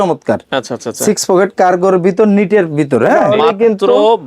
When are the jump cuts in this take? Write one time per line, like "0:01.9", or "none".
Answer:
0:03.3